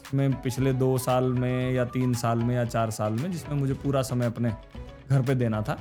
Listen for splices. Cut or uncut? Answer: uncut